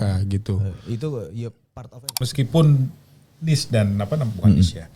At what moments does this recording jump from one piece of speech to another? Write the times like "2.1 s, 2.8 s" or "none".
2.0 s